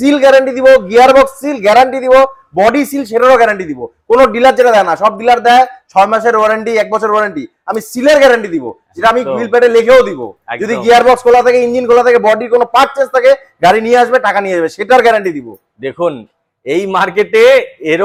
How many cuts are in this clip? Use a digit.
0